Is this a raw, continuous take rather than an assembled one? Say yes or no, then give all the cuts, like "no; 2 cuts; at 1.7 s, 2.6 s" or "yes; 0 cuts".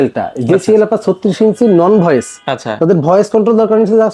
yes; 0 cuts